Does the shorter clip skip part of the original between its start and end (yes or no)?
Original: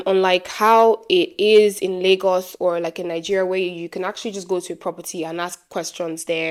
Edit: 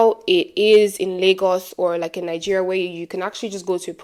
no